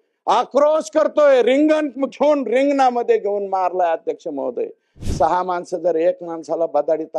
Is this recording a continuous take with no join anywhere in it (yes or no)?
yes